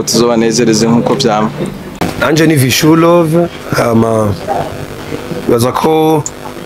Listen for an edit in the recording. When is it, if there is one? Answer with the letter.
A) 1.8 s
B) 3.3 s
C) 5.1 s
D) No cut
A